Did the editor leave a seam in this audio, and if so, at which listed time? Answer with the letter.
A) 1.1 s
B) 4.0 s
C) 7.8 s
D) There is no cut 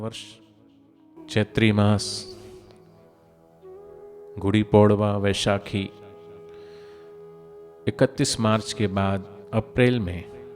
A